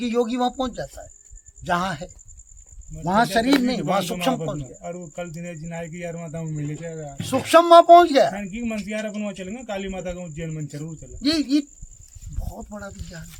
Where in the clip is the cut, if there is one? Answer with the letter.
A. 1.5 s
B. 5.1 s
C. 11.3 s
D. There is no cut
D